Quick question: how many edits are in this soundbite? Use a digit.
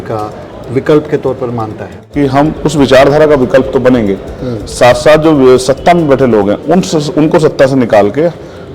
1